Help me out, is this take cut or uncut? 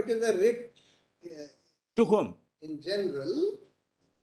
uncut